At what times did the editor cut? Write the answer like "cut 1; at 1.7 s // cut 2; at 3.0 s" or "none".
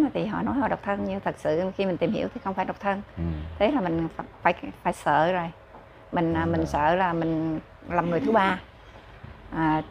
none